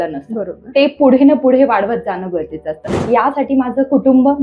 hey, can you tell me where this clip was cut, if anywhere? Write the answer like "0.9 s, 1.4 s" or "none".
2.9 s

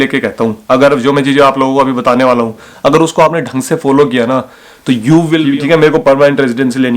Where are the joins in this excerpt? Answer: 5.4 s

